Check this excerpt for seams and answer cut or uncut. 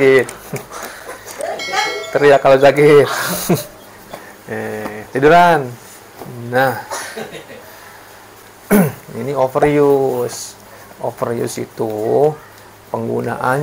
uncut